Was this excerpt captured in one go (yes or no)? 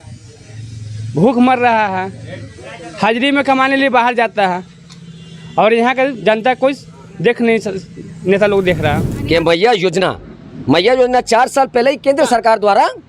no